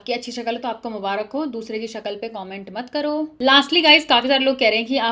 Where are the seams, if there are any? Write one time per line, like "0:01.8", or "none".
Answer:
0:03.3